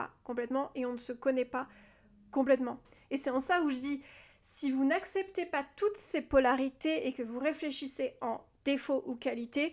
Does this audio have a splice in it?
yes; 1 cut; at 2.9 s

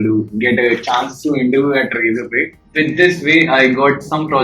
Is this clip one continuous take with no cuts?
no; 1 cut; at 2.7 s

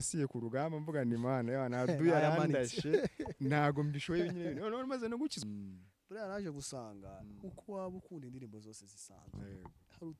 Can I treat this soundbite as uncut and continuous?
no; 1 cut; at 5.4 s

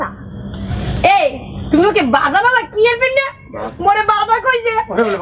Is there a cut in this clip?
no; 0 cuts

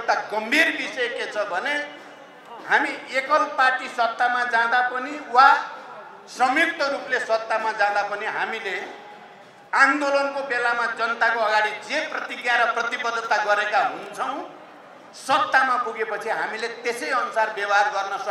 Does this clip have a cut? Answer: no; 0 cuts

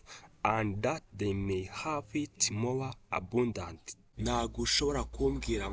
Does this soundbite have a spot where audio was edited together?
yes; 1 cut; at 4.1 s

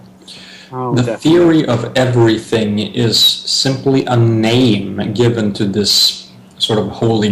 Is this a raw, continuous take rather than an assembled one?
no; 1 cut; at 2.8 s

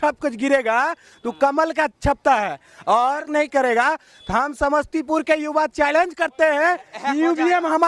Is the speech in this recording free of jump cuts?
no; 1 cut; at 3.3 s

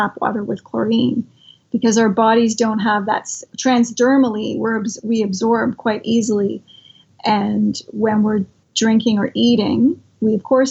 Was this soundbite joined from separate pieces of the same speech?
yes; 3 cuts; at 3.5 s, 7.1 s, 8.6 s

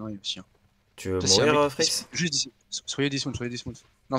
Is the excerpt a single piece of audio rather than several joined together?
yes; 0 cuts

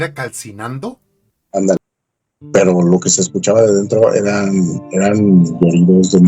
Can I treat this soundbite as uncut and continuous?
no; 1 cut; at 1.8 s

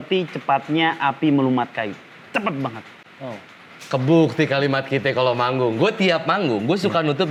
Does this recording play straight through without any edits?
yes; 0 cuts

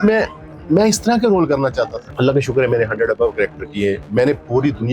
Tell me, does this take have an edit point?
yes; 1 cut; at 2.0 s

